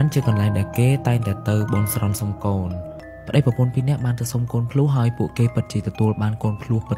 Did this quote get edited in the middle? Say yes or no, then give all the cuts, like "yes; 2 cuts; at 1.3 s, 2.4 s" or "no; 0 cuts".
yes; 1 cut; at 3.0 s